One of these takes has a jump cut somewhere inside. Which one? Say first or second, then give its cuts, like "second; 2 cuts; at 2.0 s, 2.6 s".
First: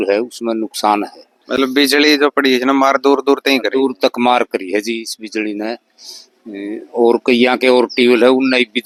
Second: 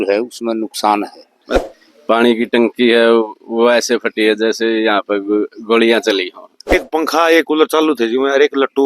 second; 2 cuts; at 1.6 s, 6.7 s